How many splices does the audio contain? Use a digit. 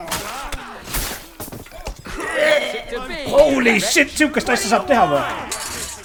0